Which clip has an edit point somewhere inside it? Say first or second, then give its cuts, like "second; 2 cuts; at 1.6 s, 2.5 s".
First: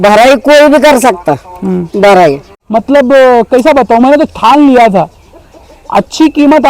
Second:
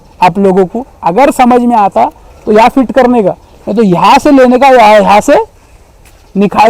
first; 1 cut; at 2.5 s